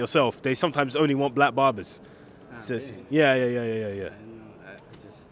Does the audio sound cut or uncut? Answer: uncut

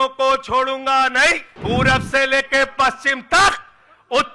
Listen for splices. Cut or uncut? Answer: cut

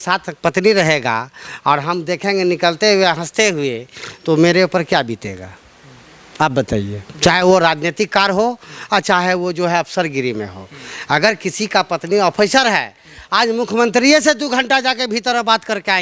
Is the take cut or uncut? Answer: uncut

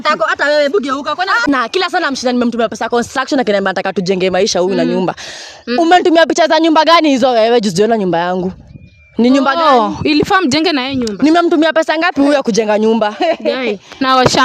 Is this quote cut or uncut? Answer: cut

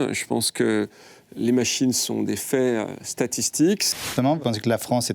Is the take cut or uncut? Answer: cut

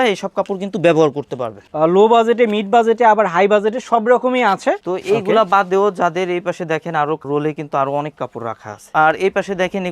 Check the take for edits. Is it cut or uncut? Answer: cut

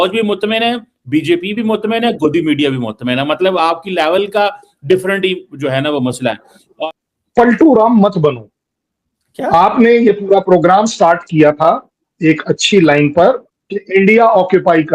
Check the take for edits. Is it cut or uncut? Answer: cut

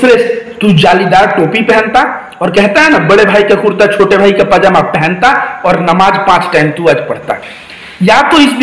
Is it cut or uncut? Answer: uncut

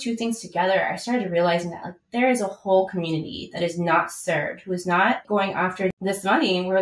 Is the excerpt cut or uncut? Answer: cut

